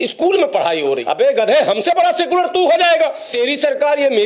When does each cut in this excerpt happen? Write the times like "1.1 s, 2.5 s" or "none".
1.0 s, 3.3 s